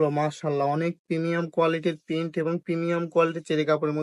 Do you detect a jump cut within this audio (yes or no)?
no